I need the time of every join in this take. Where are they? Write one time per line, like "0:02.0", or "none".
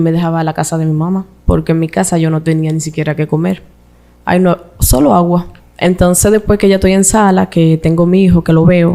0:01.3
0:05.6